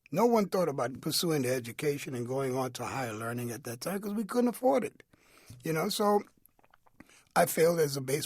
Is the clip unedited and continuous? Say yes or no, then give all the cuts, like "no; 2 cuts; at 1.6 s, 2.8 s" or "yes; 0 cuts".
no; 1 cut; at 1.0 s